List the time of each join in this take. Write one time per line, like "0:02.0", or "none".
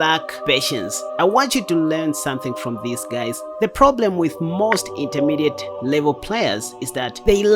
0:01.0